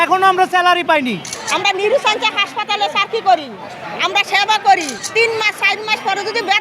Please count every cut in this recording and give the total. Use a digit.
2